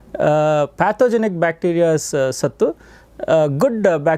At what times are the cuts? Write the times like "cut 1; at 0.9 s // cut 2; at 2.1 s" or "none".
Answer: none

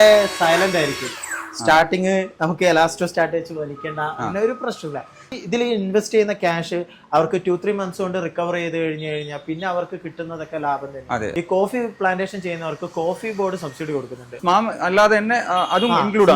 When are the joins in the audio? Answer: cut 1; at 5.4 s // cut 2; at 11.3 s // cut 3; at 14.4 s

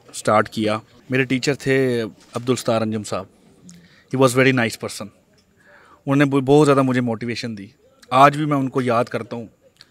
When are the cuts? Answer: cut 1; at 0.9 s

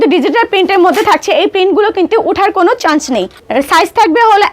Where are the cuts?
cut 1; at 3.4 s

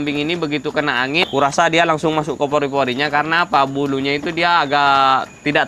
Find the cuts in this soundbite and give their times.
cut 1; at 1.2 s

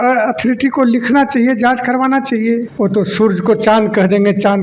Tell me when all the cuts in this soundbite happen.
cut 1; at 2.7 s

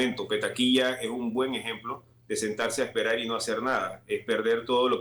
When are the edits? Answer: none

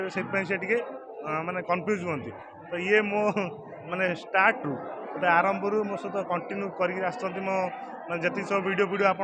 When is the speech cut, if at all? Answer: none

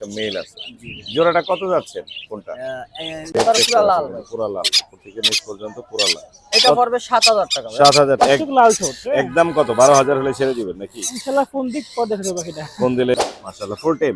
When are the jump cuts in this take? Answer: cut 1; at 3.4 s // cut 2; at 8.2 s // cut 3; at 13.1 s

